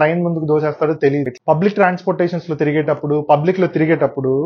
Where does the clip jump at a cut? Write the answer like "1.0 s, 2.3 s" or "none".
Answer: 1.3 s